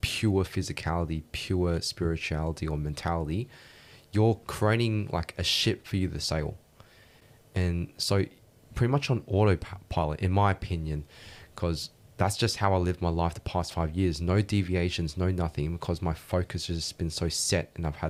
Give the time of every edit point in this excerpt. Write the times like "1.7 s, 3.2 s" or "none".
none